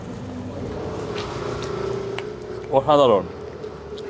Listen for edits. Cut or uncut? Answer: cut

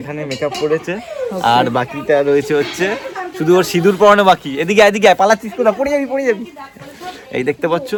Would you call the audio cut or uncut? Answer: uncut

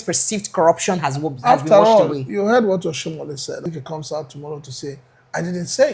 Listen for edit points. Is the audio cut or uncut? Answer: cut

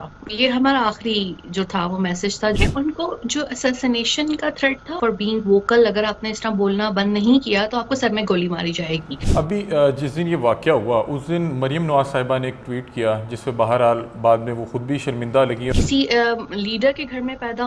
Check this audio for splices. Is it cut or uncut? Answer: cut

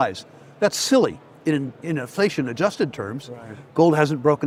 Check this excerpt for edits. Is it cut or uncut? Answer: uncut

